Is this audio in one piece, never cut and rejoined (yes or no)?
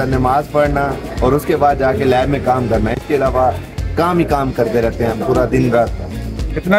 yes